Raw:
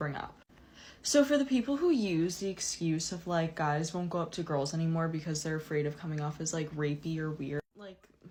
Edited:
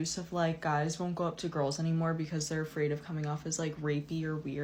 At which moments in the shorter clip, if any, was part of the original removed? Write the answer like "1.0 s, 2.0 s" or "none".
none

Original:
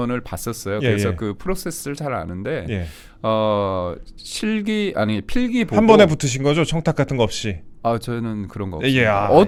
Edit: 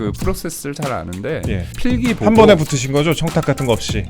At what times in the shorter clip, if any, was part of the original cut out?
1.7 s

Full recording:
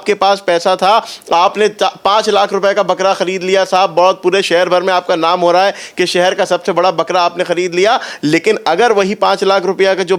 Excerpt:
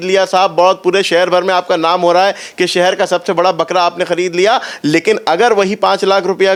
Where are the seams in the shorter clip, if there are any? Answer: none

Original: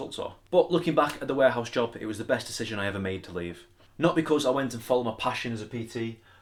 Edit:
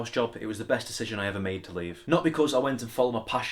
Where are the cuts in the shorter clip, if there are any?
2.0 s

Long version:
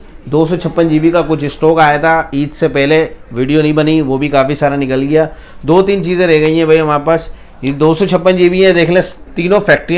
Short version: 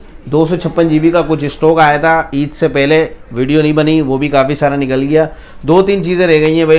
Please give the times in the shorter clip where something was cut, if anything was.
none

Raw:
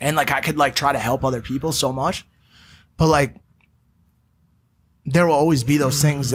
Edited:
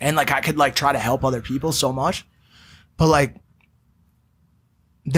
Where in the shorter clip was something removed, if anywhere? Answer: none

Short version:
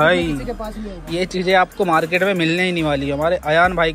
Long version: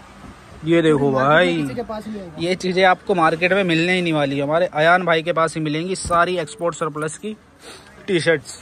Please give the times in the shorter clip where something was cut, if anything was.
none

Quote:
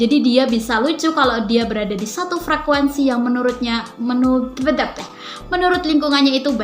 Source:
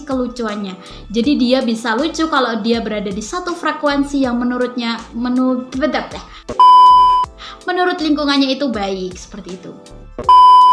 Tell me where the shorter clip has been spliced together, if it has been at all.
5.2 s

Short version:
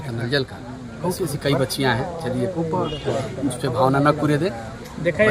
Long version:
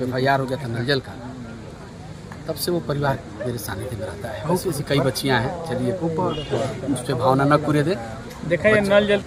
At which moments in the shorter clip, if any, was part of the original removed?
0.9 s

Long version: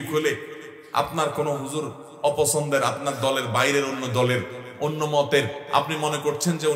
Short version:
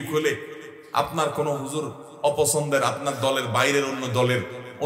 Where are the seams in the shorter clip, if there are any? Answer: none

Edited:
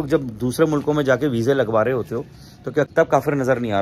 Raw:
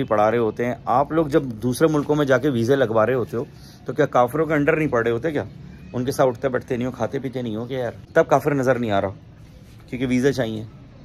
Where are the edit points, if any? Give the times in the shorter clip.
2.9 s

